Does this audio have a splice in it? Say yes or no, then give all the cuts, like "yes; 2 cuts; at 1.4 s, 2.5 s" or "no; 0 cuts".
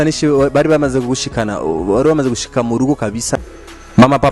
yes; 1 cut; at 3.4 s